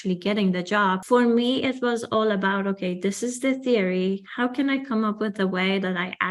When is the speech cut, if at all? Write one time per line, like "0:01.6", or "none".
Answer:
0:01.0